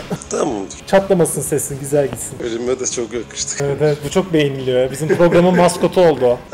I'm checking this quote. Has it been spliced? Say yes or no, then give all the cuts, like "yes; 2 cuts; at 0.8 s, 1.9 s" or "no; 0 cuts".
no; 0 cuts